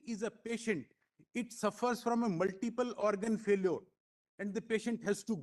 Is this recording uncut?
yes; 0 cuts

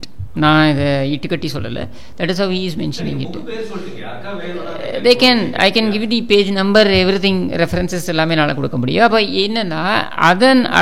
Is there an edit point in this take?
no; 0 cuts

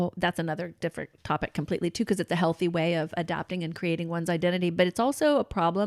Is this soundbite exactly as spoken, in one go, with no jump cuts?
yes; 0 cuts

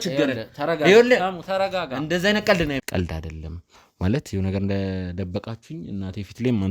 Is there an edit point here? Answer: yes; 1 cut; at 2.8 s

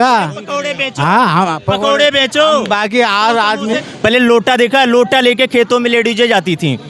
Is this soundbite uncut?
no; 1 cut; at 3.9 s

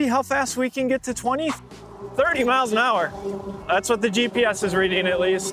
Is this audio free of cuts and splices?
no; 2 cuts; at 1.6 s, 3.5 s

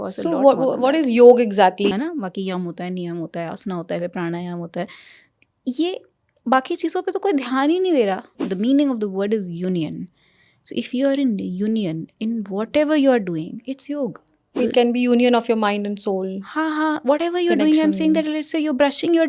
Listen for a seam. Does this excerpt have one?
yes; 3 cuts; at 1.9 s, 8.4 s, 14.6 s

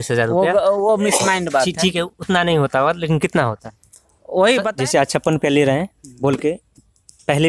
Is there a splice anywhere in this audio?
yes; 1 cut; at 4.7 s

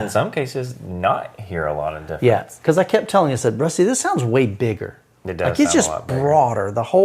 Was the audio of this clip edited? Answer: yes; 1 cut; at 2.5 s

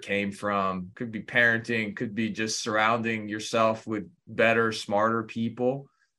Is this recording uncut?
no; 2 cuts; at 0.9 s, 4.2 s

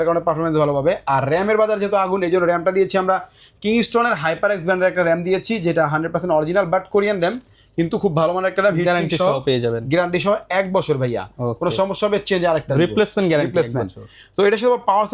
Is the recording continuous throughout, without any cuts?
yes; 0 cuts

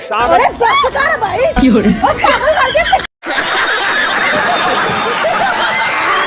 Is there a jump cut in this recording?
yes; 1 cut; at 3.2 s

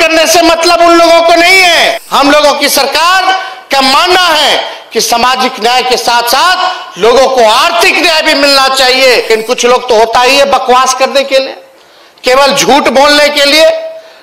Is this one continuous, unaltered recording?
no; 2 cuts; at 2.0 s, 9.3 s

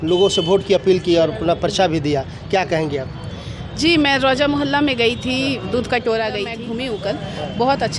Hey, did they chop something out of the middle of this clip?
yes; 1 cut; at 6.6 s

